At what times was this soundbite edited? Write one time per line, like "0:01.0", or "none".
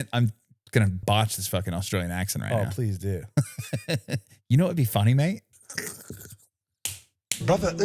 0:01.0
0:05.5